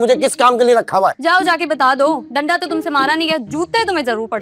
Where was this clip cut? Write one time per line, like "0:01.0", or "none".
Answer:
none